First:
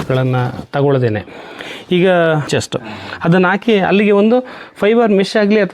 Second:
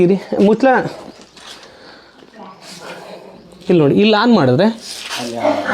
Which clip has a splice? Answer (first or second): first